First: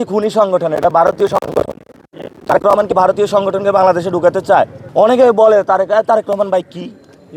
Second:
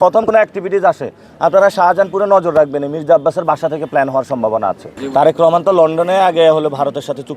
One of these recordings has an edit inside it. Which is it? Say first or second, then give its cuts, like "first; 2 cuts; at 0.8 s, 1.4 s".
second; 1 cut; at 4.9 s